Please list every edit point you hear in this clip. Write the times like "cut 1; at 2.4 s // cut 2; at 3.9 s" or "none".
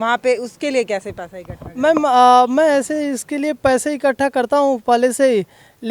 none